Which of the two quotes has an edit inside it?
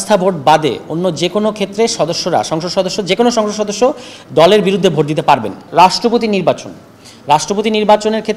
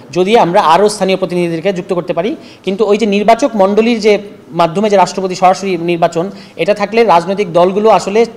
first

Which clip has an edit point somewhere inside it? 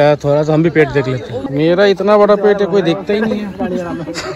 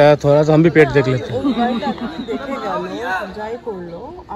first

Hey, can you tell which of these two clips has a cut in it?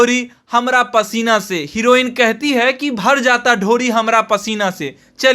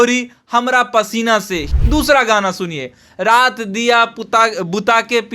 second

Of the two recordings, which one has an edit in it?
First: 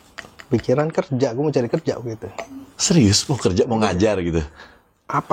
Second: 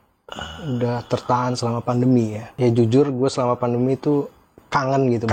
second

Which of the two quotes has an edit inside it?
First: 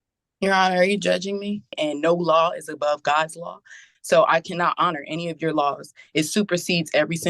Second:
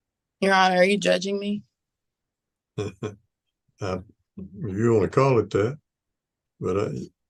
first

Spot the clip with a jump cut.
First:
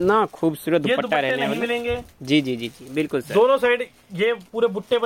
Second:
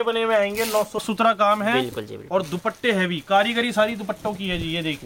second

